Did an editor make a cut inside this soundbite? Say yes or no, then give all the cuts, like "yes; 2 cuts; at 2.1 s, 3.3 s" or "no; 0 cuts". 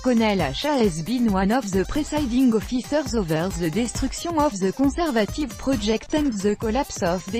no; 0 cuts